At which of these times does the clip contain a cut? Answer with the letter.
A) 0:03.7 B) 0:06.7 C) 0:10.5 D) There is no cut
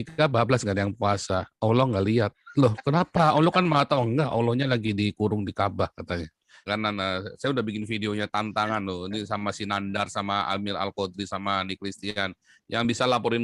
B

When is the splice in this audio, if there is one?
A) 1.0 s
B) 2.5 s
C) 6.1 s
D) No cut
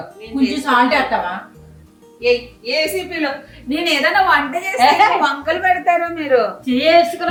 D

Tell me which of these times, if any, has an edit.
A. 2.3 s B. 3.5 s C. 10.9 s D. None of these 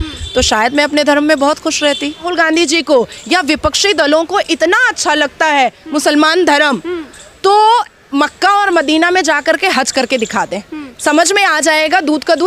A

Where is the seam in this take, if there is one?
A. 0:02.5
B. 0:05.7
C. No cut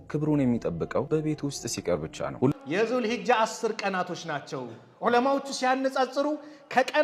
A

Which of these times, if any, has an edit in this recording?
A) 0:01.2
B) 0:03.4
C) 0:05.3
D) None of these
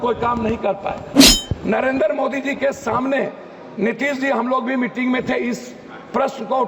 A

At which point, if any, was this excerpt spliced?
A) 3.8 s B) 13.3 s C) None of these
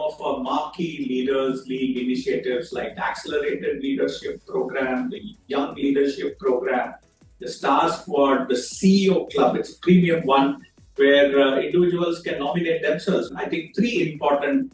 B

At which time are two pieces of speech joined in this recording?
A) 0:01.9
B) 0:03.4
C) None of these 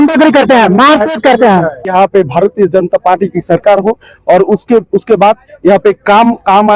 A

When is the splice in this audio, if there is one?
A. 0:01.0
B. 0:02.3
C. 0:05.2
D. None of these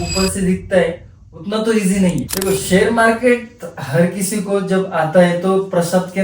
B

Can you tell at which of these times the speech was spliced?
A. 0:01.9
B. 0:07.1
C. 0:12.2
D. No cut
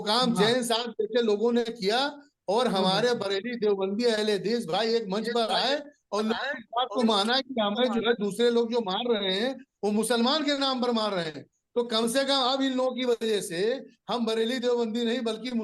D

